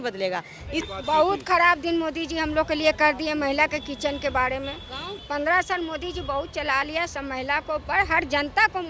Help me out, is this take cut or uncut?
cut